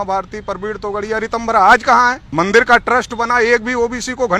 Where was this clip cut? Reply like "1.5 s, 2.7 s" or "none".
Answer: 2.2 s